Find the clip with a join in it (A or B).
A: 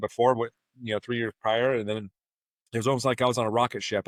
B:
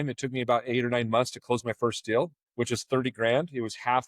B